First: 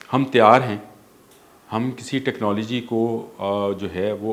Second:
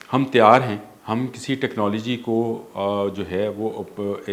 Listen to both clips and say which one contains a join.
second; 1 cut; at 0.9 s

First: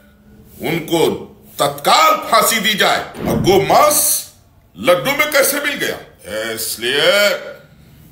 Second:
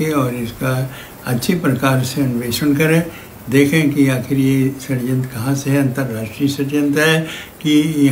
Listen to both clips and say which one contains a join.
first; 2 cuts; at 3.1 s, 6.1 s

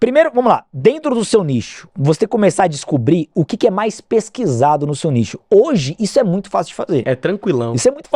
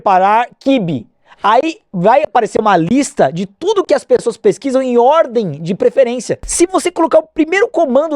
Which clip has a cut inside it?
second; 1 cut; at 6.4 s

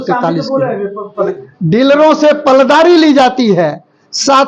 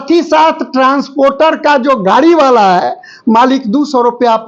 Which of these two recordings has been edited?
first; 1 cut; at 1.3 s

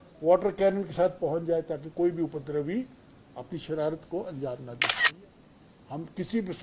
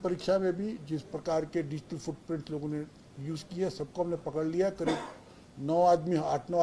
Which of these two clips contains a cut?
first; 1 cut; at 5.0 s

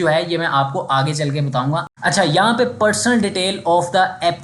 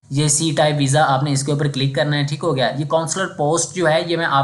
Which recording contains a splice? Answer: first; 1 cut; at 1.9 s

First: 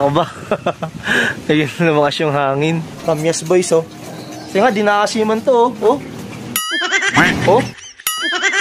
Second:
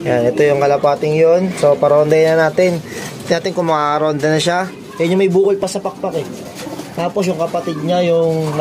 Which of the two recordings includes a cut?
first; 1 cut; at 2.9 s

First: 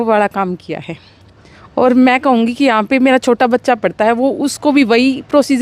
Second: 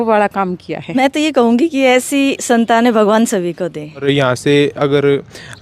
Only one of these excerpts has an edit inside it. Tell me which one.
second; 2 cuts; at 1.0 s, 4.0 s

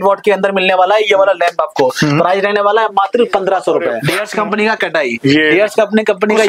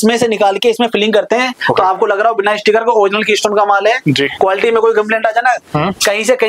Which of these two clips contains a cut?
first; 1 cut; at 4.0 s

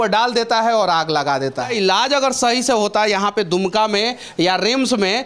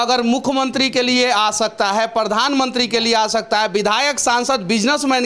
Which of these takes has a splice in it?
first; 1 cut; at 1.7 s

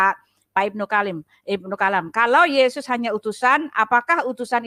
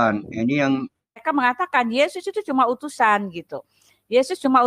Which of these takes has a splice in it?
second; 1 cut; at 1.2 s

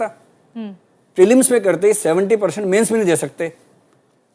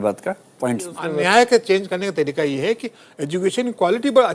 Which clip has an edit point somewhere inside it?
second; 1 cut; at 1.1 s

